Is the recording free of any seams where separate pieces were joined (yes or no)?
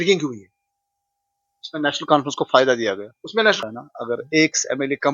no